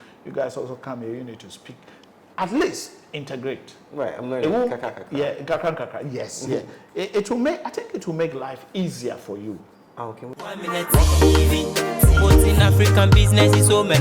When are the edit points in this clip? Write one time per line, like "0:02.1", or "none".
0:10.3